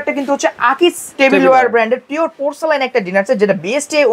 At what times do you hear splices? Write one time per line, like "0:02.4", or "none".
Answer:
0:01.0